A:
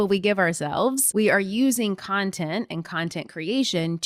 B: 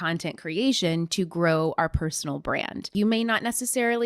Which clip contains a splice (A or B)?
B